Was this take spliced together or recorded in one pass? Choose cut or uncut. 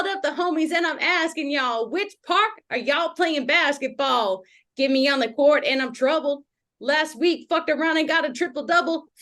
uncut